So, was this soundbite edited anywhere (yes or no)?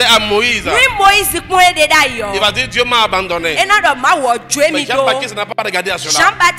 no